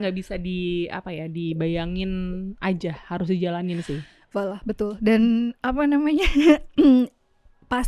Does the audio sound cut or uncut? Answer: uncut